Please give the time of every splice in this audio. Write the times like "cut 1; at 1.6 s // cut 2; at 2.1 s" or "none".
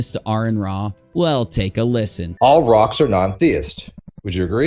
cut 1; at 1.1 s // cut 2; at 2.2 s